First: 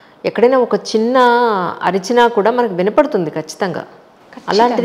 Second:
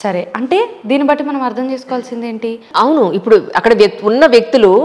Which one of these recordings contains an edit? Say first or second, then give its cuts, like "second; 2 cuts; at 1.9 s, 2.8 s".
second; 1 cut; at 2.6 s